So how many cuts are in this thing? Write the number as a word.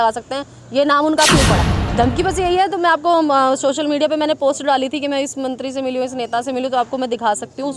one